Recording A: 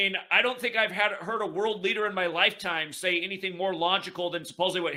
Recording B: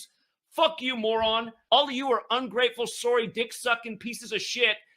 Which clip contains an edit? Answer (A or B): B